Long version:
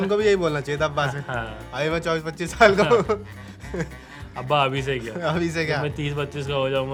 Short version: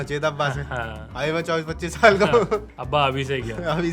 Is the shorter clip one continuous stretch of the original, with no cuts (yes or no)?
no